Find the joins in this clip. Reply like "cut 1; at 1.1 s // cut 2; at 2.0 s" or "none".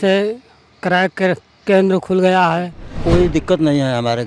cut 1; at 3.0 s